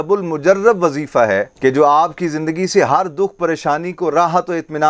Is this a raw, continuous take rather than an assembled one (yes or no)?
yes